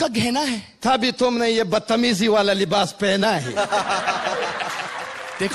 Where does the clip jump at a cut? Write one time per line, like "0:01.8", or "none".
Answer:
none